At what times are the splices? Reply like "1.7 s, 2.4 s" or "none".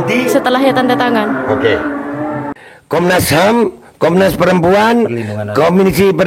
2.4 s